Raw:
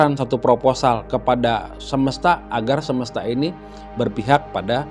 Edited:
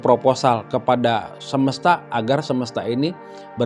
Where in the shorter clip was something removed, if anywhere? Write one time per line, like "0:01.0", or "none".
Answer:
none